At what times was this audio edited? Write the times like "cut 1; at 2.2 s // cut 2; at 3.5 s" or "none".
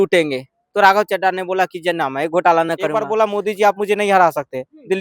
cut 1; at 3.0 s

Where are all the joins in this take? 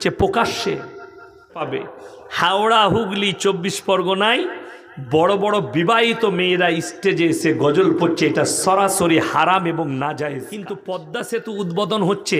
cut 1; at 1.6 s // cut 2; at 10.6 s

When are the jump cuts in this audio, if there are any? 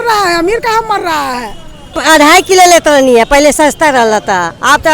cut 1; at 2.0 s

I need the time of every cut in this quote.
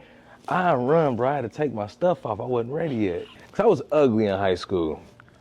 cut 1; at 3.4 s

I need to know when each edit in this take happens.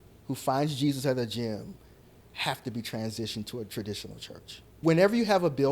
cut 1; at 4.8 s

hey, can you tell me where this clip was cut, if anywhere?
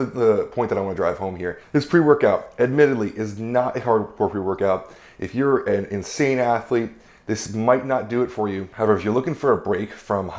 cut 1; at 1.5 s // cut 2; at 8.7 s

